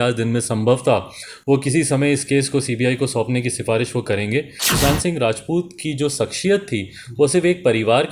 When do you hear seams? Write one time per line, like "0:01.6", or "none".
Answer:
0:04.6